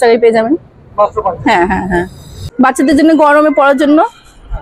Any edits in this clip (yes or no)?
yes